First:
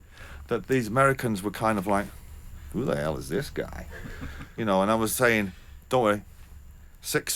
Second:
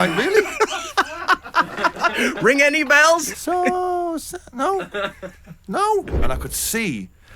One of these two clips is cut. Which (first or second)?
second